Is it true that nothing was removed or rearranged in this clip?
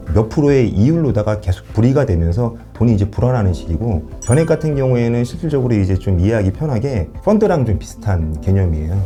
yes; 0 cuts

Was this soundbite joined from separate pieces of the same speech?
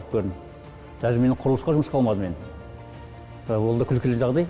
no; 0 cuts

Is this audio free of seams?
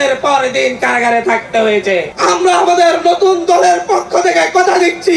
no; 1 cut; at 2.1 s

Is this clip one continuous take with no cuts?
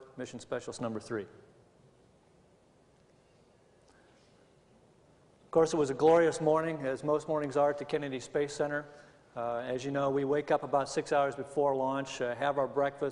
yes; 0 cuts

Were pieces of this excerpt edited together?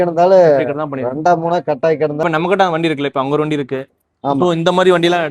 yes; 1 cut; at 2.2 s

